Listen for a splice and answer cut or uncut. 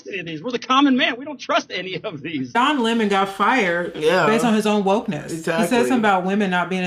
cut